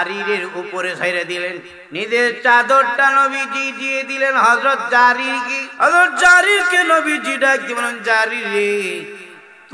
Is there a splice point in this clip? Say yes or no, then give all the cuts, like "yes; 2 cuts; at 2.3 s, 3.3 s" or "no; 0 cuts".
yes; 2 cuts; at 1.7 s, 5.6 s